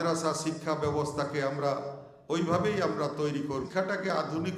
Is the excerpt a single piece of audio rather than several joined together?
no; 1 cut; at 3.5 s

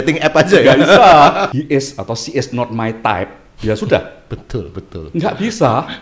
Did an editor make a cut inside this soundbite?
yes; 1 cut; at 1.5 s

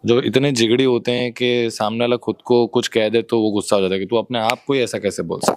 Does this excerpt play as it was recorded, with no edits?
yes; 0 cuts

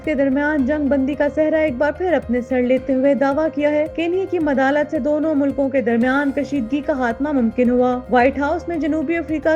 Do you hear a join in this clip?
no; 0 cuts

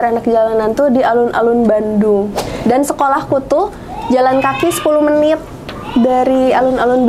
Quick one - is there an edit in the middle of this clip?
yes; 1 cut; at 2.5 s

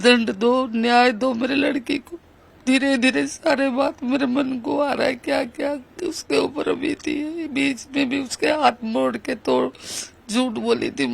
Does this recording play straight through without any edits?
no; 1 cut; at 2.5 s

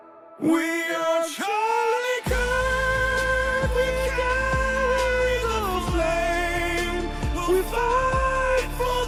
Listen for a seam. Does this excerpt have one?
no; 0 cuts

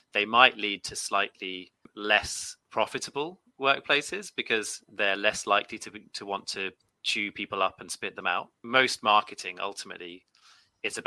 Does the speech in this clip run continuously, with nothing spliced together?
no; 2 cuts; at 1.9 s, 8.6 s

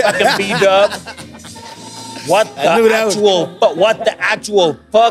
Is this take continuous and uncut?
yes; 0 cuts

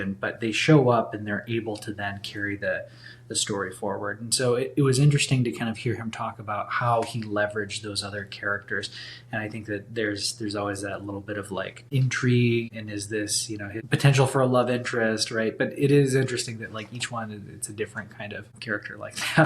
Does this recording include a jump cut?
yes; 1 cut; at 13.2 s

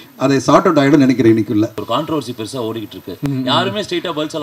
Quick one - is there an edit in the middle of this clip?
yes; 1 cut; at 1.8 s

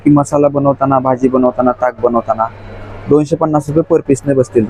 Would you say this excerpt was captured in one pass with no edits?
yes; 0 cuts

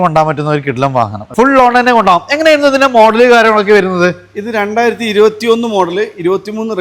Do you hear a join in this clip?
yes; 1 cut; at 1.2 s

